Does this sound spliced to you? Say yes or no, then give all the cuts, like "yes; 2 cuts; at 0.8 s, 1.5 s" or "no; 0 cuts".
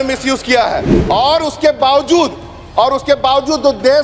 yes; 1 cut; at 0.9 s